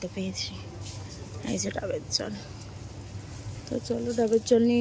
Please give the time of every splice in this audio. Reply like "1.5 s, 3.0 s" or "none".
none